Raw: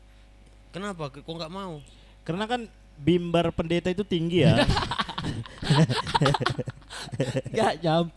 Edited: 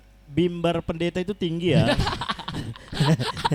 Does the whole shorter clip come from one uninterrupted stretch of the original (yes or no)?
yes